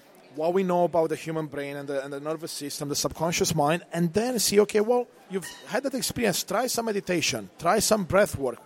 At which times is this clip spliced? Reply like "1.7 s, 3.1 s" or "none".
5.2 s